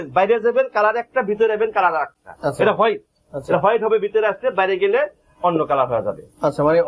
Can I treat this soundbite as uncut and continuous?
yes; 0 cuts

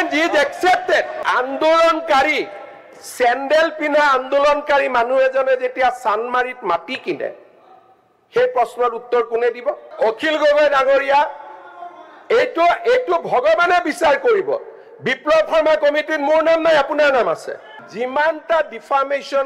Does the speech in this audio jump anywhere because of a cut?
yes; 3 cuts; at 1.2 s, 9.9 s, 17.8 s

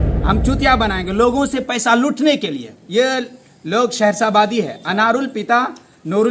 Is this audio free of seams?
yes; 0 cuts

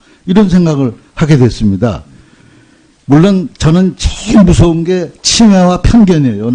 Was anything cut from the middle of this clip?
no; 0 cuts

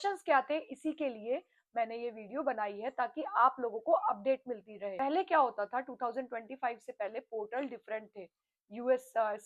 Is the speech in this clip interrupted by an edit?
yes; 1 cut; at 4.8 s

